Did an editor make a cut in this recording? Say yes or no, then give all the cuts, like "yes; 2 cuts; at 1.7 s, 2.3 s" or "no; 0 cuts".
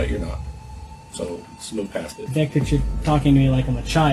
yes; 1 cut; at 2.2 s